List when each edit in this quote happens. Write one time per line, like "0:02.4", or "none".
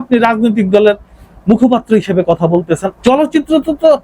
0:02.9